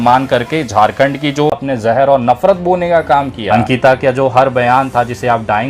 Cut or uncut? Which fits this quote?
cut